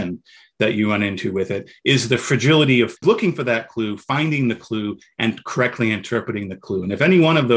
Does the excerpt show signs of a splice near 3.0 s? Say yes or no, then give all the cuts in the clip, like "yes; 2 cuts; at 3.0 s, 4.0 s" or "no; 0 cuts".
yes; 1 cut; at 3.0 s